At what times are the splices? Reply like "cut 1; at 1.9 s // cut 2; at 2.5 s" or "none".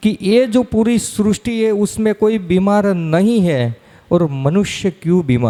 none